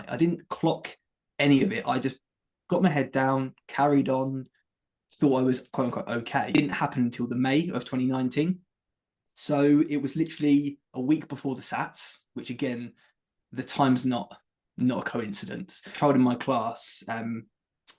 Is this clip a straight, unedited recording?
no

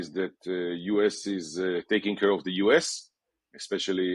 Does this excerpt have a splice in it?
no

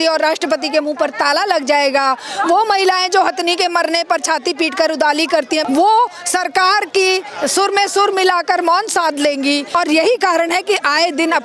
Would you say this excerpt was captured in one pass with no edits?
no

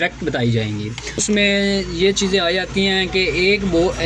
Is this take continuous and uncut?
yes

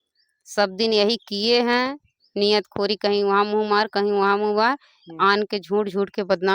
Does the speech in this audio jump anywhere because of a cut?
no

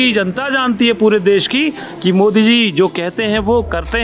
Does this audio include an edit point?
no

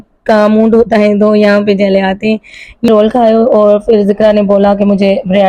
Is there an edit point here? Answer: yes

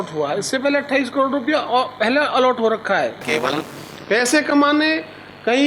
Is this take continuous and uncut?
no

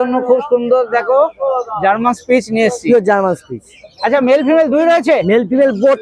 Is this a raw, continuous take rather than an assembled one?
yes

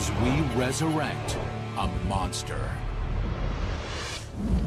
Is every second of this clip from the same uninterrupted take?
yes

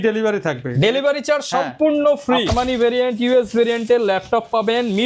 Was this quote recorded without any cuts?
no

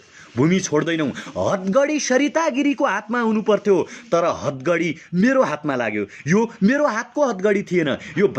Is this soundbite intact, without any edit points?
yes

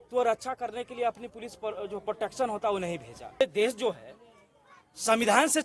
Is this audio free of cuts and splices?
no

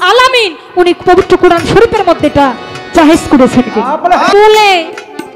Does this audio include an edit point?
yes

